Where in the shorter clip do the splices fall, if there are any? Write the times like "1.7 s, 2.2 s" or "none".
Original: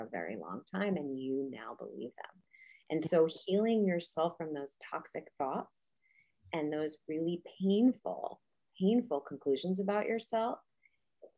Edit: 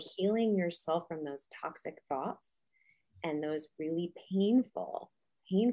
none